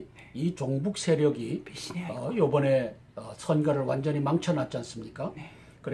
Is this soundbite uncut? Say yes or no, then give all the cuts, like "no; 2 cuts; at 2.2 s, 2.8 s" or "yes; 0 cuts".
yes; 0 cuts